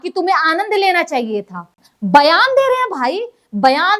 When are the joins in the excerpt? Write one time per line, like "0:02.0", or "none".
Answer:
0:01.8

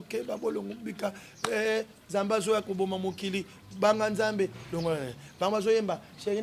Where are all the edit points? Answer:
none

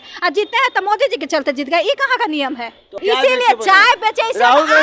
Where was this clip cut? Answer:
0:03.0

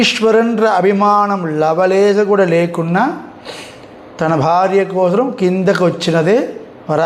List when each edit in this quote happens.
none

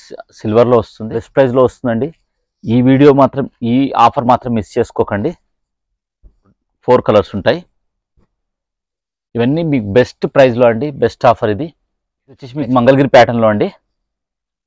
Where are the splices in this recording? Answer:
0:01.3
0:06.7
0:12.5

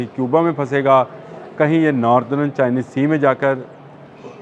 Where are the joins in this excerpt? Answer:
none

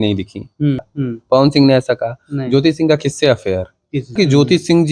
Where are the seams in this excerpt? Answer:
0:01.0
0:04.2

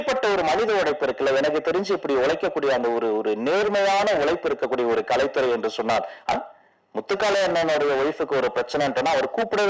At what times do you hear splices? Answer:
0:06.3

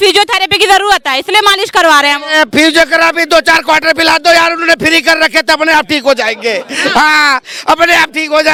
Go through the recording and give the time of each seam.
none

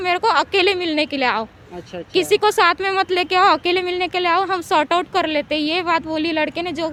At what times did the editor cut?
none

